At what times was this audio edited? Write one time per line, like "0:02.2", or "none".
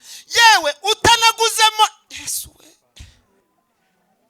0:03.4

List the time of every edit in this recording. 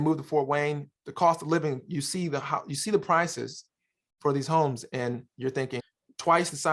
0:05.8

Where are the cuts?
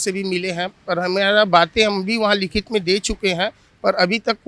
none

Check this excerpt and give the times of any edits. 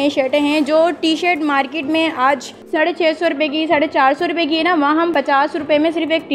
0:02.5
0:05.1

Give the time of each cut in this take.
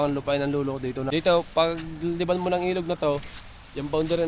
0:01.0

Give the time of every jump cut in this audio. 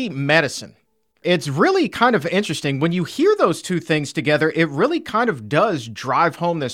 0:01.1

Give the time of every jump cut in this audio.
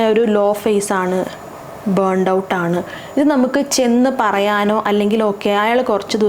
none

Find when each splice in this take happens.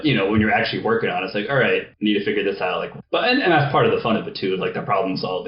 0:01.9
0:02.9

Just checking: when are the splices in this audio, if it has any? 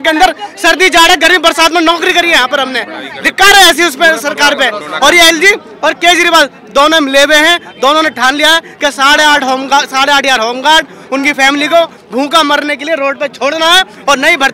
none

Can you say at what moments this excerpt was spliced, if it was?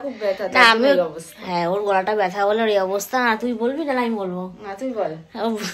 none

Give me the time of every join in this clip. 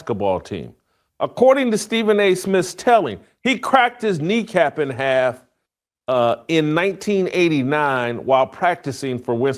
none

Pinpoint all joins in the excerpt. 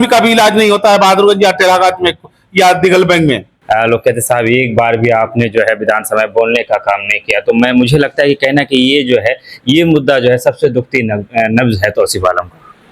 0:03.5

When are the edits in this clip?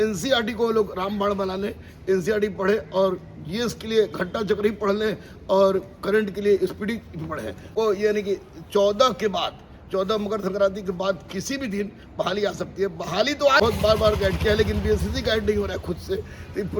0:07.7
0:13.6

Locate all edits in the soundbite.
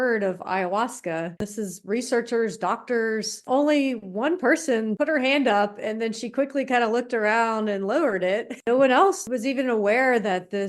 0:01.4
0:03.4
0:04.9
0:08.6
0:09.2

